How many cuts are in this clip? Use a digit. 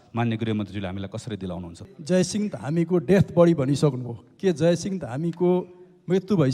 1